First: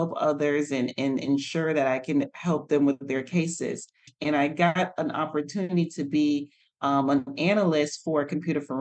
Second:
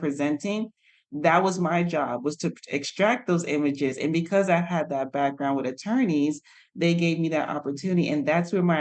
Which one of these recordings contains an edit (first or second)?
first